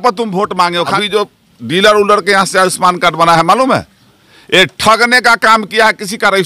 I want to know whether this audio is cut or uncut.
cut